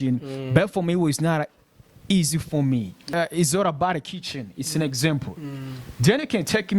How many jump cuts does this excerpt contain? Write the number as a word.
one